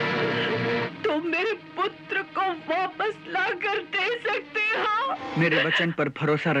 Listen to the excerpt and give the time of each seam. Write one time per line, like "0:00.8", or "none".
0:00.9
0:05.2